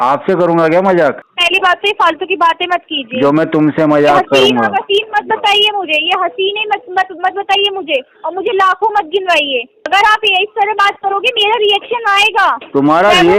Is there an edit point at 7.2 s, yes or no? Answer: no